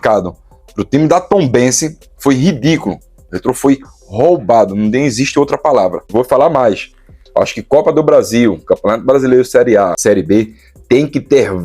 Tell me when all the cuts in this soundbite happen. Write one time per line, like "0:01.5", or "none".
0:06.1
0:10.0